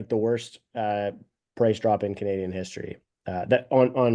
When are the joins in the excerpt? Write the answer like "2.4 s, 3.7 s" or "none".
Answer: none